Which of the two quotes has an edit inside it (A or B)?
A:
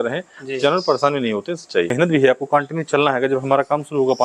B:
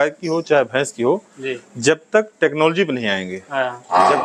A